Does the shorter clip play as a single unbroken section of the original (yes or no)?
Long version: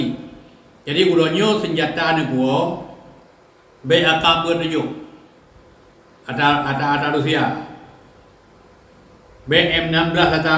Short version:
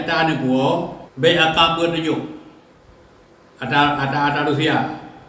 no